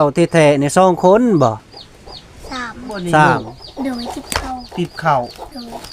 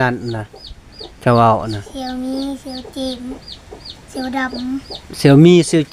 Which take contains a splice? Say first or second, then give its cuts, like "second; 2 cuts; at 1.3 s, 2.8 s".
first; 1 cut; at 3.6 s